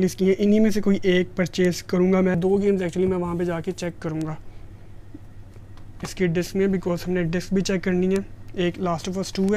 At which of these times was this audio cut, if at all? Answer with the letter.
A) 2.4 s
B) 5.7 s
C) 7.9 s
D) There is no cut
A